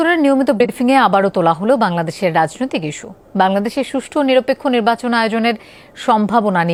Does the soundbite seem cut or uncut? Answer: uncut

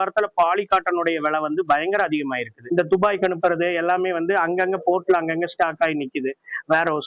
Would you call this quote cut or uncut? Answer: cut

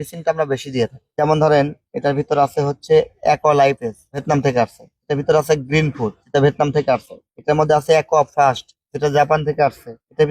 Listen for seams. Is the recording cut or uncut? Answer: uncut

